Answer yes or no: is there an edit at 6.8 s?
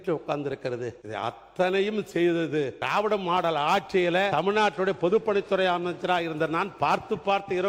no